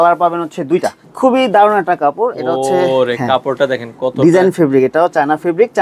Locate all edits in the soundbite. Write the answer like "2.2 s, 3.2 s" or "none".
1.0 s